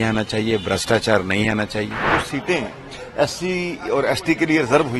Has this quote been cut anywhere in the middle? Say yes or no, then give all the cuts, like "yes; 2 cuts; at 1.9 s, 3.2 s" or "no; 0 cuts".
yes; 1 cut; at 2.1 s